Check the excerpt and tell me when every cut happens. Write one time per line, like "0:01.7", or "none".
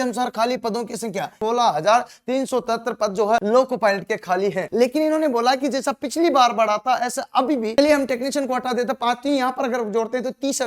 0:01.3
0:03.4
0:04.6
0:07.8